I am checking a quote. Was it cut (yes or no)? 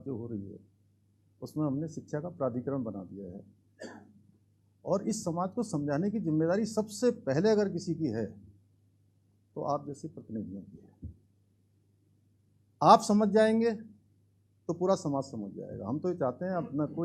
no